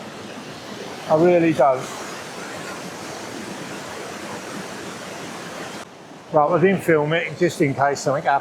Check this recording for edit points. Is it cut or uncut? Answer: cut